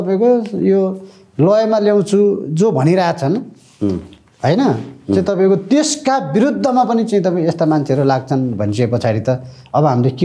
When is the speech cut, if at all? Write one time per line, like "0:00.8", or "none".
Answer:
none